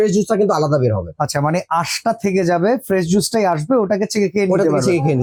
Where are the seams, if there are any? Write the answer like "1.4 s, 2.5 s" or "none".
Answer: none